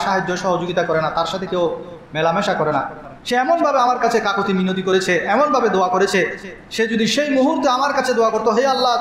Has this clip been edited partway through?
yes; 1 cut; at 3.1 s

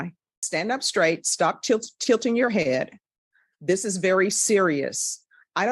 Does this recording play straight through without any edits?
yes; 0 cuts

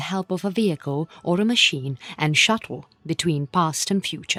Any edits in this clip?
no; 0 cuts

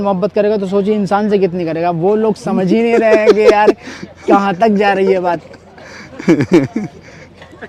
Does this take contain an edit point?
no; 0 cuts

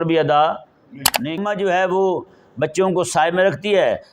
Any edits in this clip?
yes; 1 cut; at 1.4 s

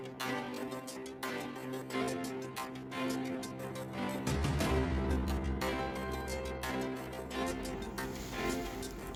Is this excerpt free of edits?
yes; 0 cuts

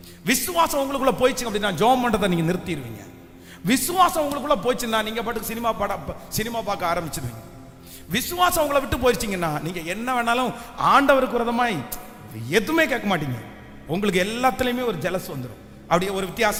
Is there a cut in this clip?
no; 0 cuts

